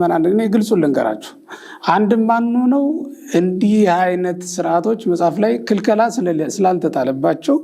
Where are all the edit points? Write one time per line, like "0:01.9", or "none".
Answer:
none